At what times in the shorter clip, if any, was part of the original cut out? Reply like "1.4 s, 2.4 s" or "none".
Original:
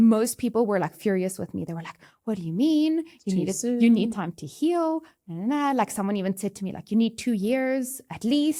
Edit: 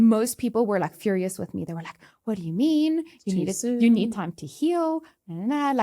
none